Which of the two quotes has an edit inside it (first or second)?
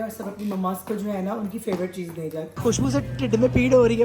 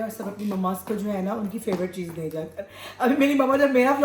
first